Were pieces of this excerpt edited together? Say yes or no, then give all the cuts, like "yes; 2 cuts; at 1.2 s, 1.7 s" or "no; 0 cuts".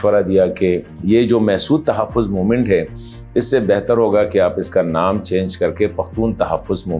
yes; 1 cut; at 0.9 s